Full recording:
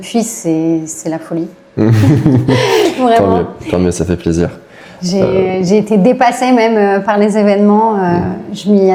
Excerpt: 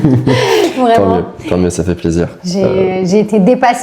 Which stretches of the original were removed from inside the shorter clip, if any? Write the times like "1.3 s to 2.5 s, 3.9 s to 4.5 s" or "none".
4.6 s to 5.0 s

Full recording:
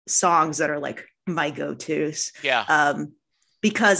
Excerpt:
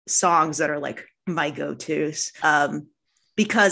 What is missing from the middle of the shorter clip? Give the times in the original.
2.4 s to 2.6 s

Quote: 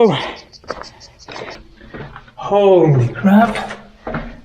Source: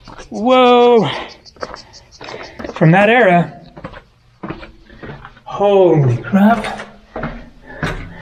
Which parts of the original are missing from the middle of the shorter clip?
2.5 s to 4.7 s

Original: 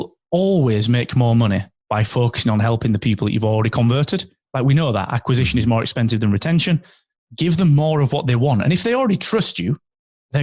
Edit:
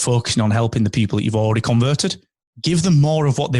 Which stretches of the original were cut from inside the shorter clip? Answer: 4.4 s to 7.0 s

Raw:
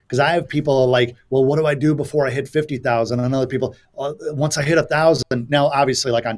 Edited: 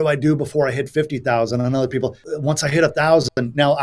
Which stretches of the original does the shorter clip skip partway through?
3.8 s to 4.2 s

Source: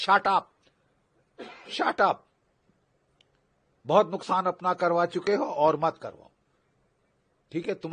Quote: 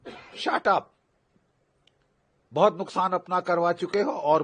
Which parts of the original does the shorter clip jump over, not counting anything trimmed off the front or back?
none

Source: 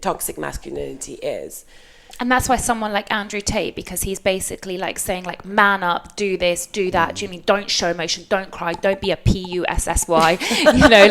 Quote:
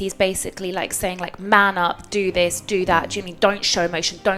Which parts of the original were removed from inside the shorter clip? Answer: none

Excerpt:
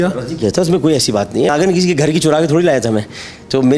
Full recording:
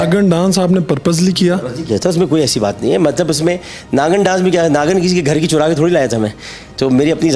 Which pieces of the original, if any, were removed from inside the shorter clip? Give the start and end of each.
3.0 s to 4.8 s

